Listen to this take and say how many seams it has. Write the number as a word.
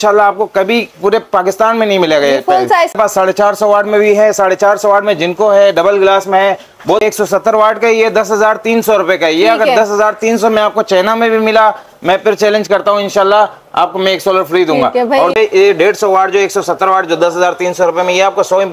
three